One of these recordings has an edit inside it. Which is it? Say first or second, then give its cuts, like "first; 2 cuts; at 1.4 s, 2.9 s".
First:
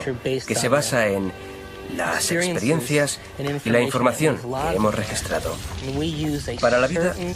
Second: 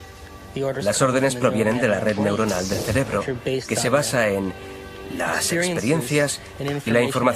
first; 1 cut; at 6.1 s